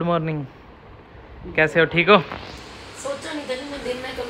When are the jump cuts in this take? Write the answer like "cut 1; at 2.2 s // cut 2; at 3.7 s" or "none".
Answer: none